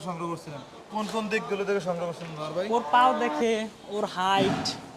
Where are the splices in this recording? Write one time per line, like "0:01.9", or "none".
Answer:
none